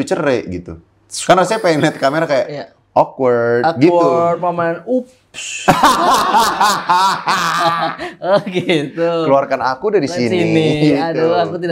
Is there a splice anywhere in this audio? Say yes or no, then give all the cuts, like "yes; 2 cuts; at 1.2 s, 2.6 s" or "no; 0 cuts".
no; 0 cuts